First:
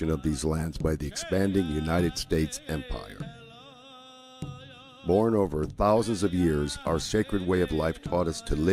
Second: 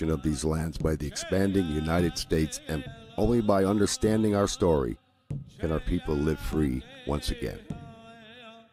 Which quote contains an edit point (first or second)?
first